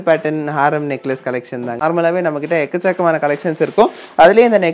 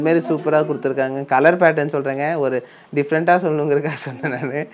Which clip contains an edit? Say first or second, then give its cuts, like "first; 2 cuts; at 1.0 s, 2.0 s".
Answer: first; 1 cut; at 1.7 s